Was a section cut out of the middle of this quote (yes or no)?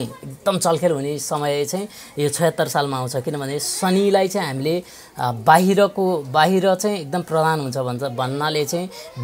no